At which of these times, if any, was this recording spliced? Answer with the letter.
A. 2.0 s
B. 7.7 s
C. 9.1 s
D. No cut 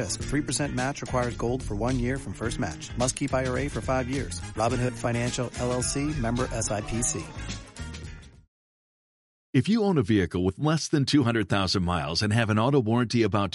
C